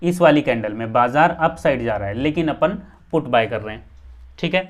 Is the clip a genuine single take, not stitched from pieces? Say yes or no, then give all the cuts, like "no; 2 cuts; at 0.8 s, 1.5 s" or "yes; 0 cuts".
yes; 0 cuts